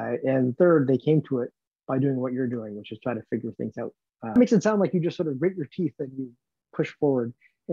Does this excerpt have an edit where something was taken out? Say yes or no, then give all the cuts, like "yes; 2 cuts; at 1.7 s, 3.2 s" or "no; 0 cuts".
yes; 1 cut; at 4.3 s